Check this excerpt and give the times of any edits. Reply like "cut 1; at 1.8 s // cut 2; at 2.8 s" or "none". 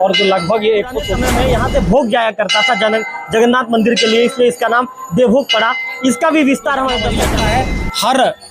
cut 1; at 1.2 s // cut 2; at 7.2 s